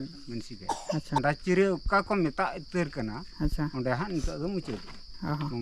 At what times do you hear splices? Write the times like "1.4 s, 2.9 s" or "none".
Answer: 1.2 s